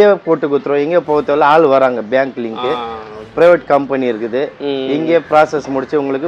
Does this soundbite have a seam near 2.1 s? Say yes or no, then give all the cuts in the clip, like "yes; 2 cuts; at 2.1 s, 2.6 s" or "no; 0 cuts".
no; 0 cuts